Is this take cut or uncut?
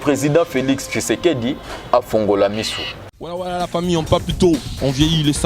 cut